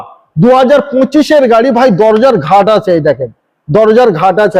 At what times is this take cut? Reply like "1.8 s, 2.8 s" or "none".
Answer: none